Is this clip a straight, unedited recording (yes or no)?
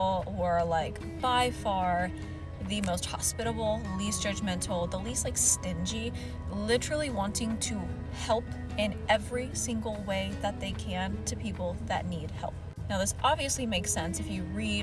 yes